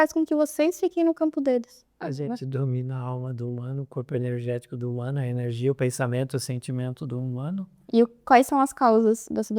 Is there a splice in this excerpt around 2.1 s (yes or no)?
yes